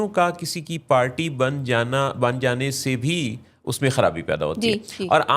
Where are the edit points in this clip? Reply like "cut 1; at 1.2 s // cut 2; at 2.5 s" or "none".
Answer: none